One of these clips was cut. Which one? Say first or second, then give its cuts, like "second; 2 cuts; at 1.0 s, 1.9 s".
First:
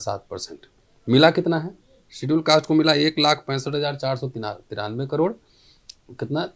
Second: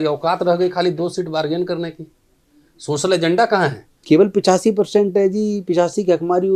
second; 1 cut; at 3.9 s